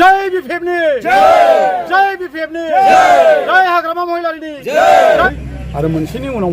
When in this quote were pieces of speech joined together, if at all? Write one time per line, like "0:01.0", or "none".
0:05.2